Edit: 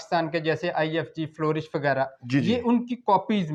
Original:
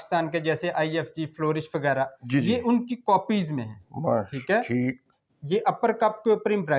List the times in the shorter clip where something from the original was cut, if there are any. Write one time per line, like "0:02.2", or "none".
none